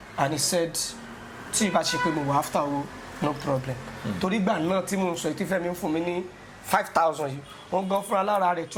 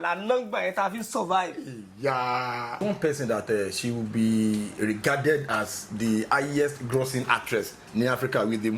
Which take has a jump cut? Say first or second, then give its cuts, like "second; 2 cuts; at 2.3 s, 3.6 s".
second; 1 cut; at 2.8 s